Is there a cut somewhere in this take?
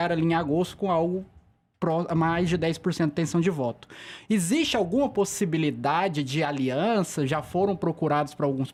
no; 0 cuts

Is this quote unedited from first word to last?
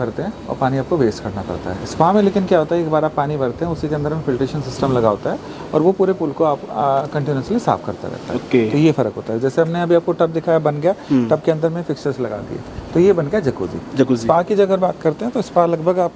yes; 0 cuts

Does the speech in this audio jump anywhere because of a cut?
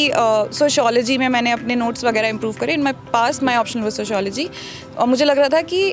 no; 0 cuts

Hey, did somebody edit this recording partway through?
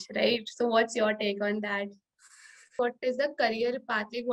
yes; 1 cut; at 2.8 s

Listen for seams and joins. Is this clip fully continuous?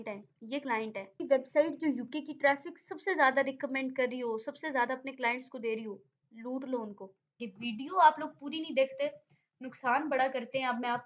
no; 2 cuts; at 1.2 s, 7.5 s

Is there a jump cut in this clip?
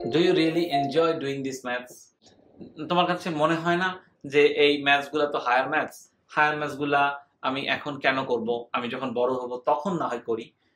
no; 0 cuts

